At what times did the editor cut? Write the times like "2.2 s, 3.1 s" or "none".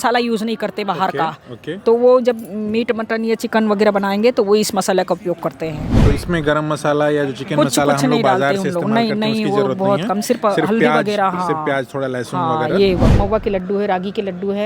5.9 s, 13.1 s